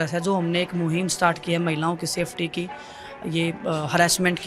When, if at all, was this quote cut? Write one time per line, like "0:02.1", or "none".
none